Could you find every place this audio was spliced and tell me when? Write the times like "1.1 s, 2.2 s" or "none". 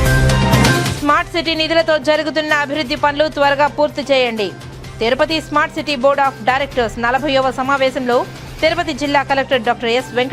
0.9 s